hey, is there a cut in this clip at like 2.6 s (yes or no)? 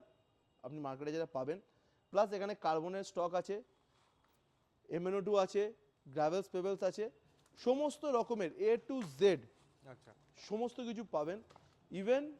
no